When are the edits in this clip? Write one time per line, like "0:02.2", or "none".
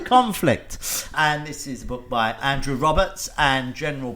0:01.1
0:02.4